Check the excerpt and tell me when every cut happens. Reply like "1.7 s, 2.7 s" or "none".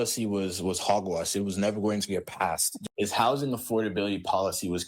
2.7 s